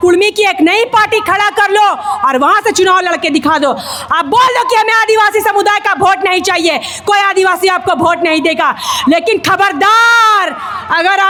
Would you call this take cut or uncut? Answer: uncut